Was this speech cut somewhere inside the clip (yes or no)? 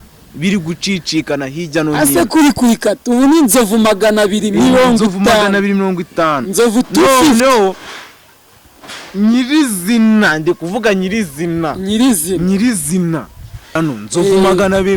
yes